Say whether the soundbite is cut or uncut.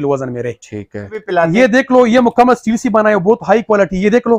cut